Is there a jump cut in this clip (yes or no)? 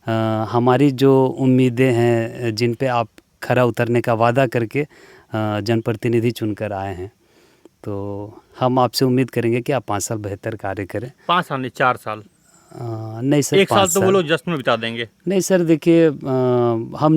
no